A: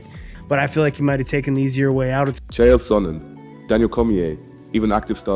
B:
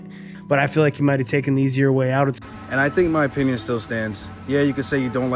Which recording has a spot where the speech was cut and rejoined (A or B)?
B